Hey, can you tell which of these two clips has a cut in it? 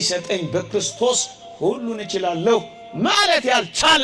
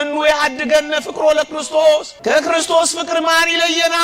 second; 1 cut; at 2.1 s

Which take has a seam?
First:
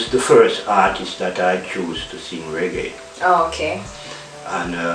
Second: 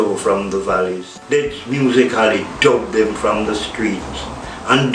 second; 1 cut; at 1.1 s

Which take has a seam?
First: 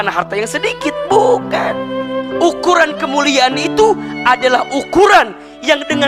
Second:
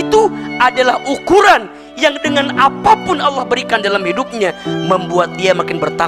first; 1 cut; at 2.0 s

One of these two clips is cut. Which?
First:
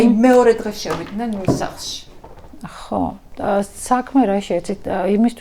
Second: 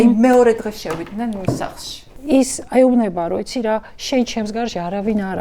second; 1 cut; at 2.1 s

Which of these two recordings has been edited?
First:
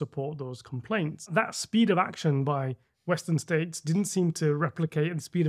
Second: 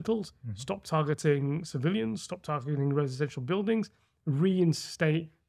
first; 1 cut; at 1.3 s

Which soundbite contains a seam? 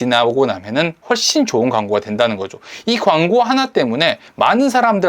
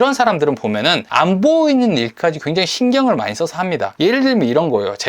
second; 2 cuts; at 1.0 s, 3.9 s

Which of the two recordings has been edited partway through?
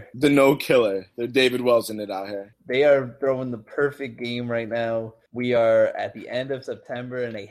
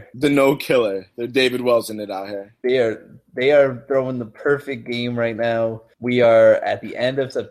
first; 1 cut; at 2.4 s

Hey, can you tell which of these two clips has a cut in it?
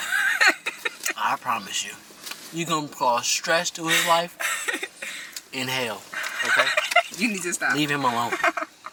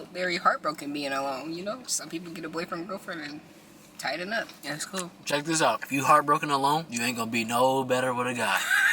second; 4 cuts; at 1.9 s, 4.6 s, 5.8 s, 6.9 s

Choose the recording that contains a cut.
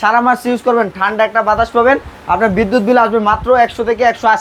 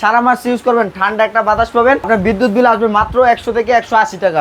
second; 1 cut; at 2.1 s

